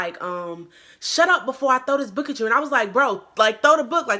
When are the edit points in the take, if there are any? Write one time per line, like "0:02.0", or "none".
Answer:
none